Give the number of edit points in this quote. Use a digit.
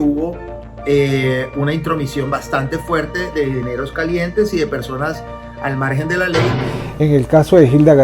1